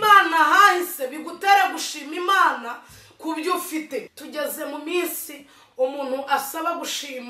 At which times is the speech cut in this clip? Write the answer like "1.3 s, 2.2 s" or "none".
4.2 s